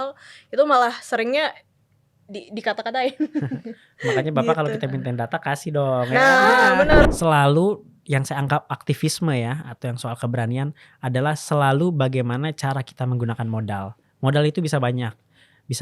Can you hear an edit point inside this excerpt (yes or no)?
yes